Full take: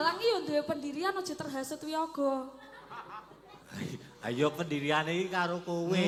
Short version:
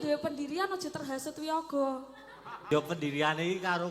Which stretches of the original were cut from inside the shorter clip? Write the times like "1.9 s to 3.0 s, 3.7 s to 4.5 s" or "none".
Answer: 3.1 s to 4.4 s